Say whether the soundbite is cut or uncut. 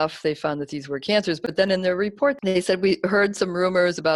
uncut